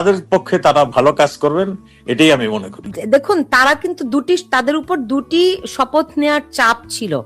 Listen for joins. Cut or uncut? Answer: cut